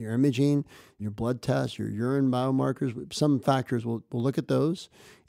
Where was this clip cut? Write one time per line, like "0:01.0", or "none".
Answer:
0:01.0